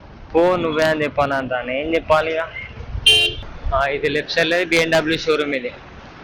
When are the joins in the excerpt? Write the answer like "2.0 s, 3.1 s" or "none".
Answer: 3.4 s